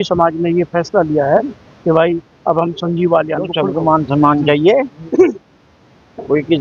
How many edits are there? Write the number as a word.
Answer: one